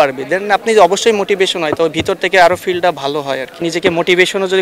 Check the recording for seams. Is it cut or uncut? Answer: cut